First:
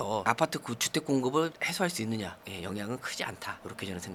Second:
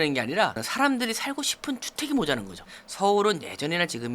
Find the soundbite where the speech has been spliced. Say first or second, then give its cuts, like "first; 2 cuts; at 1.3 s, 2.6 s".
second; 1 cut; at 2.7 s